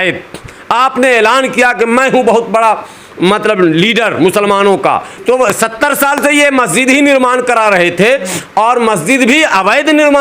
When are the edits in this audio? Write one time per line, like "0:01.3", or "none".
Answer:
0:05.2